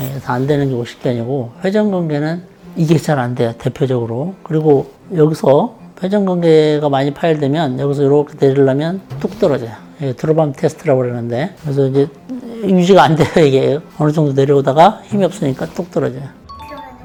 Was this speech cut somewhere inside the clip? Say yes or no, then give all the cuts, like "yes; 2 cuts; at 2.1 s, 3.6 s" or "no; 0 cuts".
no; 0 cuts